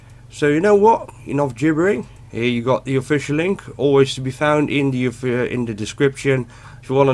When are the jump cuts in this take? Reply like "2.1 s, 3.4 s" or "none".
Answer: 1.8 s

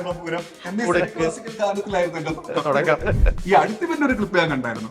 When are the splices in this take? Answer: 3.4 s

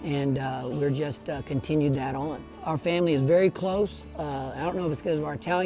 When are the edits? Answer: 2.5 s

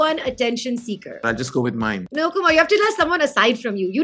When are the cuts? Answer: 1.2 s, 2.1 s

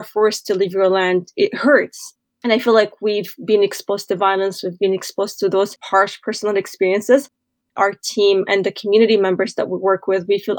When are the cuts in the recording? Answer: 7.5 s

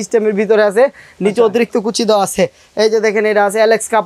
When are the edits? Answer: none

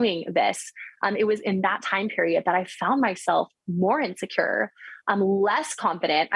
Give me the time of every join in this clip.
none

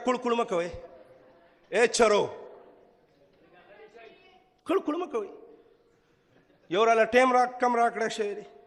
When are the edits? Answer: none

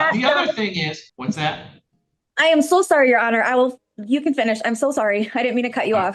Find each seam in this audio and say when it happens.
1.1 s

